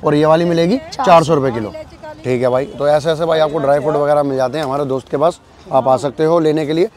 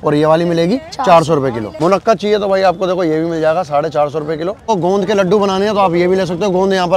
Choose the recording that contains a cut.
second; 2 cuts; at 1.7 s, 4.7 s

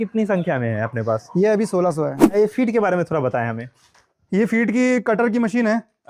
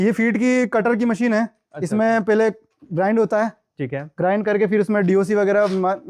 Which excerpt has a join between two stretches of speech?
first; 1 cut; at 2.3 s

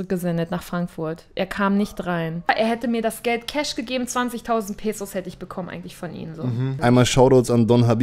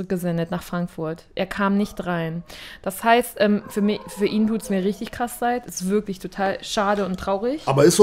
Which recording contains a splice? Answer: first; 2 cuts; at 2.5 s, 6.8 s

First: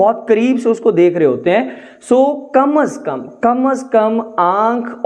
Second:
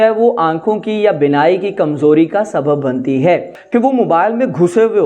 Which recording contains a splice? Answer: second; 1 cut; at 3.6 s

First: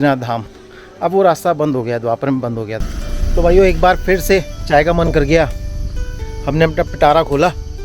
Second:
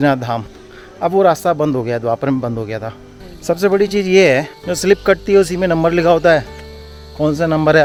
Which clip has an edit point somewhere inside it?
first; 1 cut; at 2.9 s

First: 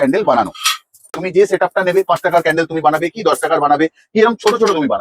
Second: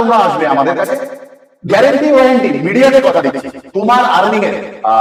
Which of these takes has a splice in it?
first; 1 cut; at 1.1 s

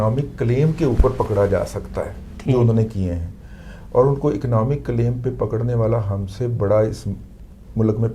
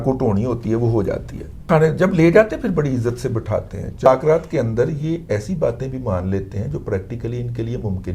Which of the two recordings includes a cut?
second; 2 cuts; at 1.6 s, 4.1 s

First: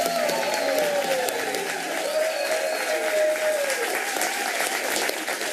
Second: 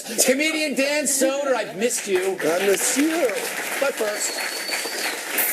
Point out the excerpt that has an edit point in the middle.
second; 1 cut; at 4.3 s

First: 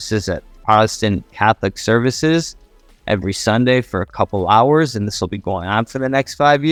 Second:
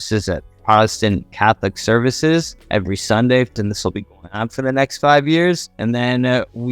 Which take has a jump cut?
second; 3 cuts; at 2.6 s, 3.5 s, 5.7 s

